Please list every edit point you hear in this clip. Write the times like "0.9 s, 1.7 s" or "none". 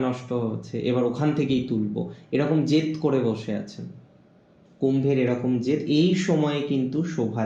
none